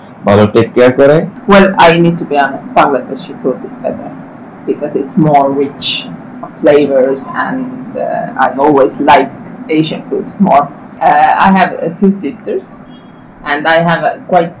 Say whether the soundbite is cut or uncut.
cut